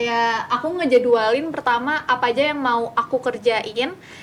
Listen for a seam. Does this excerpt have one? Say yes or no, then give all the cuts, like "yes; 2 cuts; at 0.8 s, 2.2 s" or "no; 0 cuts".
no; 0 cuts